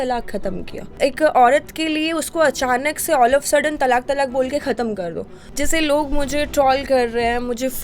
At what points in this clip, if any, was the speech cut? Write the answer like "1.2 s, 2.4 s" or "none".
1.0 s, 5.4 s